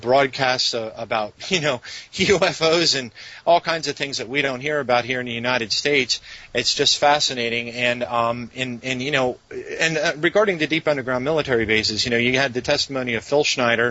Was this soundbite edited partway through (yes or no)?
no